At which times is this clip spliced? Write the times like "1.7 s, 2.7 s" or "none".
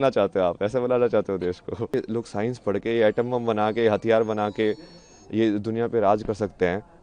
1.9 s